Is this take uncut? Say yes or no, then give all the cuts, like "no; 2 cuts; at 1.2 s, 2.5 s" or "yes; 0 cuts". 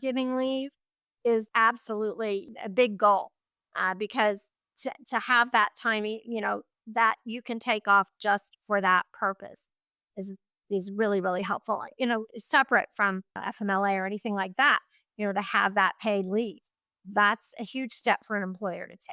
no; 2 cuts; at 1.5 s, 2.5 s